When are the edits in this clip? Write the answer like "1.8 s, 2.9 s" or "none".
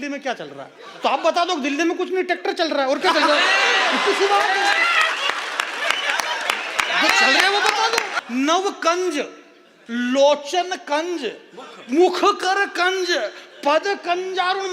8.1 s